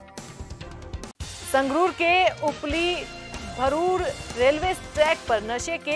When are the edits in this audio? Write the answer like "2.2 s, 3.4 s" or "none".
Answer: 1.1 s

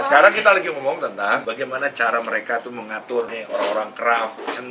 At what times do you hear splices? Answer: 1.4 s, 3.4 s

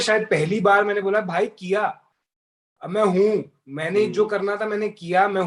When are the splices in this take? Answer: none

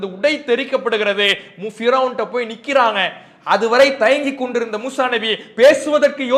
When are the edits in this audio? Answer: none

